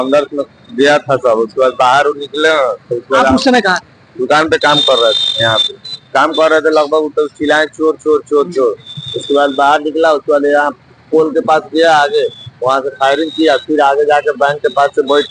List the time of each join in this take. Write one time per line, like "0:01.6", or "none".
none